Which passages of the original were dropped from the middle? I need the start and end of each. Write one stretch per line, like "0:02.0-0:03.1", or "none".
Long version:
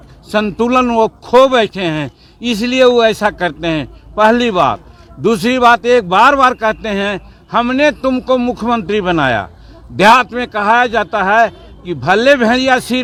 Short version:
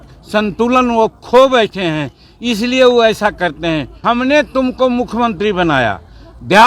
0:03.9-0:07.4